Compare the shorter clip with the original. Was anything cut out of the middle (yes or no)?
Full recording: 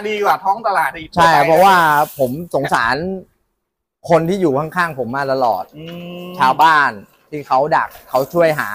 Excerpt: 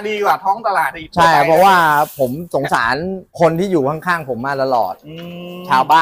yes